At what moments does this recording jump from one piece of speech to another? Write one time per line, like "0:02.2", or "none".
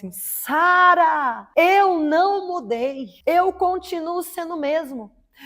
0:01.4
0:03.1